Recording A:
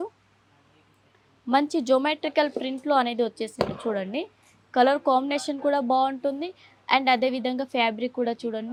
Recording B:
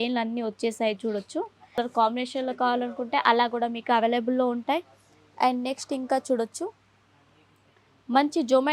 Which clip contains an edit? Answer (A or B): B